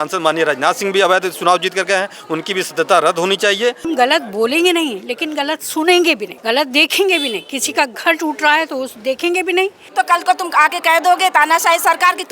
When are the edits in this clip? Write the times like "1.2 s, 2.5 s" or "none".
3.8 s, 6.3 s, 9.8 s